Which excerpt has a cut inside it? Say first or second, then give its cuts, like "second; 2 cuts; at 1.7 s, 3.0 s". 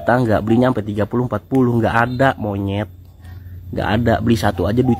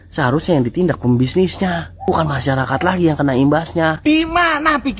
second; 1 cut; at 4.0 s